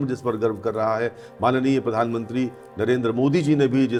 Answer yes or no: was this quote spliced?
no